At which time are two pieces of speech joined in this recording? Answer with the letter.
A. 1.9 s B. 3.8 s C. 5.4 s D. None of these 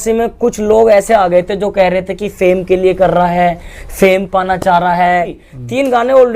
C